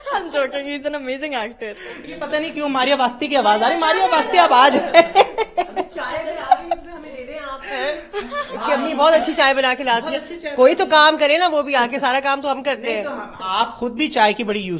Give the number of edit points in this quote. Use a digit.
1